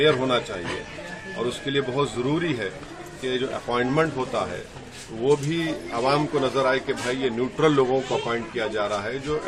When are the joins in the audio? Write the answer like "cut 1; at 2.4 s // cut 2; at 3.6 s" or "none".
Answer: none